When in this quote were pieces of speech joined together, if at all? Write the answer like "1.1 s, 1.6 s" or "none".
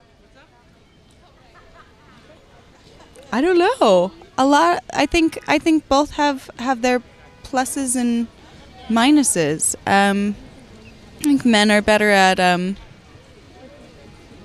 9.2 s